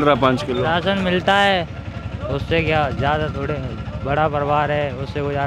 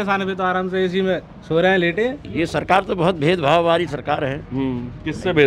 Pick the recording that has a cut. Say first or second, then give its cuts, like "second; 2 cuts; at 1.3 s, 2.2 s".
second; 1 cut; at 2.2 s